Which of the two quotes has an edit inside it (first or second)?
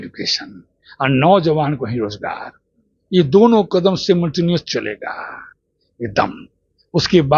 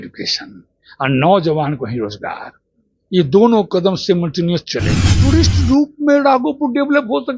second